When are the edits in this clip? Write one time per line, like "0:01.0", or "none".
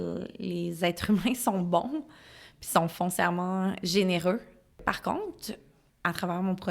0:03.8
0:04.8